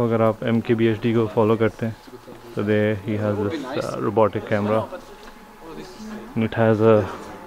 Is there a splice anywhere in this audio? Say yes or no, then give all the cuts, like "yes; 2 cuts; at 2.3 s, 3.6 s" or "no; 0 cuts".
no; 0 cuts